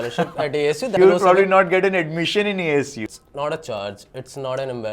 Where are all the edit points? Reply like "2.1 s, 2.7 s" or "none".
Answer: 0.9 s, 3.0 s